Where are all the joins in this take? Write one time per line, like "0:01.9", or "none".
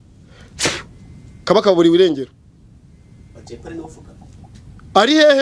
none

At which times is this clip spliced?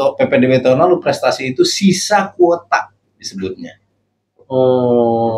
none

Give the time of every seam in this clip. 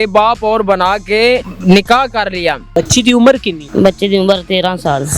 0:01.5
0:02.6
0:03.6

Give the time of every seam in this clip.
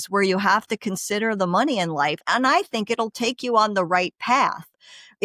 none

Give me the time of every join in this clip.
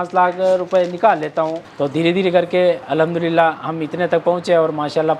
0:01.6

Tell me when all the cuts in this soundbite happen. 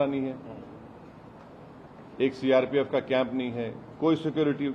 none

